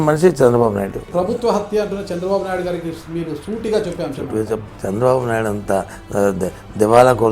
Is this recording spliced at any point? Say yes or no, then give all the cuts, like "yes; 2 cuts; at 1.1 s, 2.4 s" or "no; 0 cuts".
yes; 2 cuts; at 1.0 s, 4.7 s